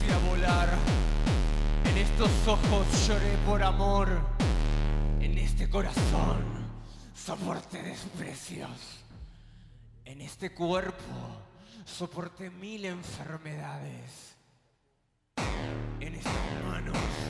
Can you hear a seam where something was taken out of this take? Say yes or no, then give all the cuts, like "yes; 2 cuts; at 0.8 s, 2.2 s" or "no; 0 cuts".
no; 0 cuts